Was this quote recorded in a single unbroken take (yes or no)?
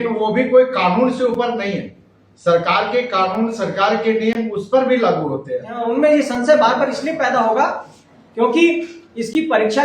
no